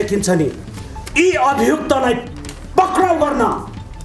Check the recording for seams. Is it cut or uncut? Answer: uncut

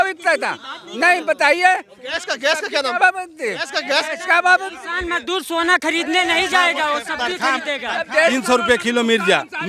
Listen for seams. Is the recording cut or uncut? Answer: cut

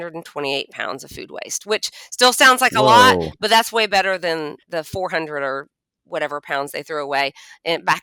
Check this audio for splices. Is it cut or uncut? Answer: uncut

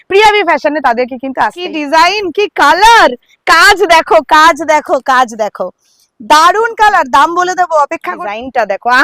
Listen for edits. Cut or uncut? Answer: cut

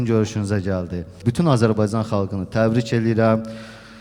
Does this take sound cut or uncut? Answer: cut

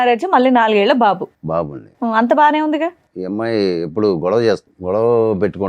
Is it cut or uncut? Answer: cut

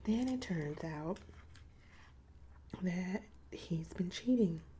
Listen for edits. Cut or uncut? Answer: uncut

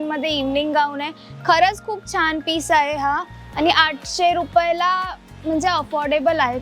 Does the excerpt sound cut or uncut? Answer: uncut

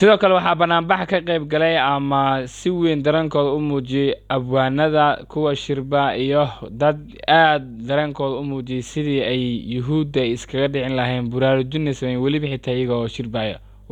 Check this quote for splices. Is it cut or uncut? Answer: uncut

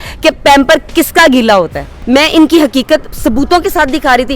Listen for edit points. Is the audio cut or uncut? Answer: cut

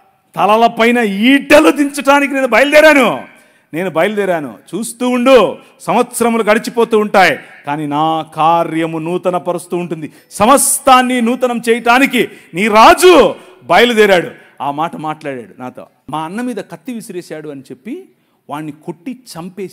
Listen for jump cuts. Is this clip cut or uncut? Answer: cut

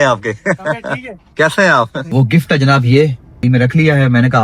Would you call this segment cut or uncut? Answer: cut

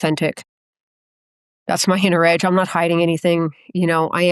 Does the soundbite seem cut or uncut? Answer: uncut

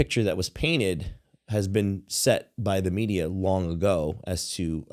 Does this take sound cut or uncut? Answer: uncut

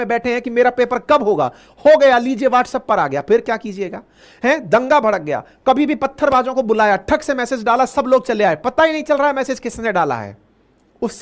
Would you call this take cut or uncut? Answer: uncut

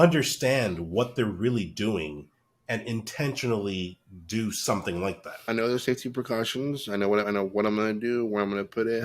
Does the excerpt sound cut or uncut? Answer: cut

